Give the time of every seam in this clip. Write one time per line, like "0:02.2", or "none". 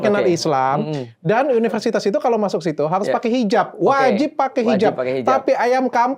none